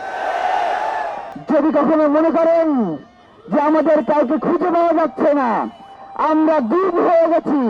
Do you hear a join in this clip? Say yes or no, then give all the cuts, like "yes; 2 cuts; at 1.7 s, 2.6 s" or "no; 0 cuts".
yes; 1 cut; at 1.3 s